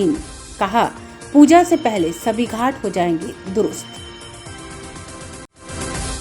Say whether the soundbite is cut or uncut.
uncut